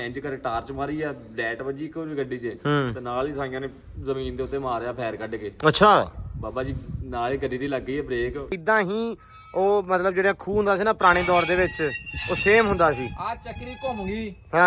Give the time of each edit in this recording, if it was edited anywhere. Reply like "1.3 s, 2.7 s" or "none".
8.5 s